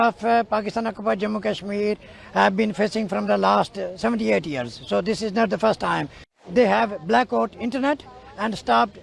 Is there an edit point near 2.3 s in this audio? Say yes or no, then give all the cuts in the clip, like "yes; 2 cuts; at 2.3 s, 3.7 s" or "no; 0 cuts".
no; 1 cut; at 6.4 s